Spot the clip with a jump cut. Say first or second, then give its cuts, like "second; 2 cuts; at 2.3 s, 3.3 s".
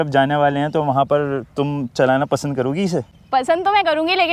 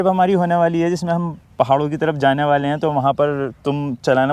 first; 1 cut; at 3.2 s